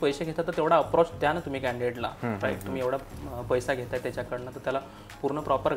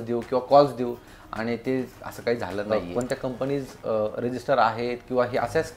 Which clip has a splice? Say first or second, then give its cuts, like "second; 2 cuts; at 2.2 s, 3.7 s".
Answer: second; 1 cut; at 2.7 s